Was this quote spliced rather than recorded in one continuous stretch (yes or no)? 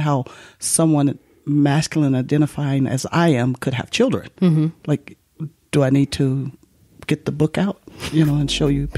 no